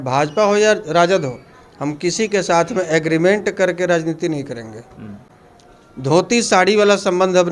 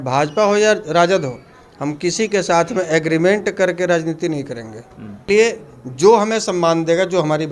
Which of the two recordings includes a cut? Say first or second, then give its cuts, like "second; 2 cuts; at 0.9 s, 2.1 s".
second; 1 cut; at 5.2 s